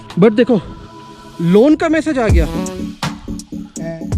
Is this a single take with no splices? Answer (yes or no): no